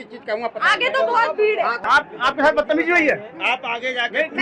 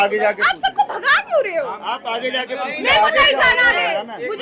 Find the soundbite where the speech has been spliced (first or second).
first